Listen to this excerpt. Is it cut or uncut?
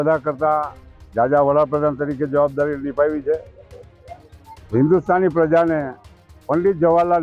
uncut